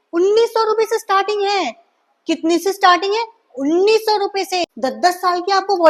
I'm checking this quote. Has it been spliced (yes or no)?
yes